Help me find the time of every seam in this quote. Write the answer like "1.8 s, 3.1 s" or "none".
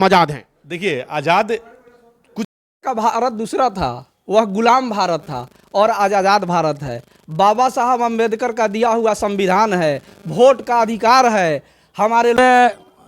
2.5 s, 12.4 s